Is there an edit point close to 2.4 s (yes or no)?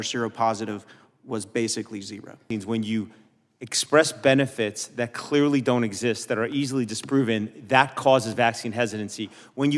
yes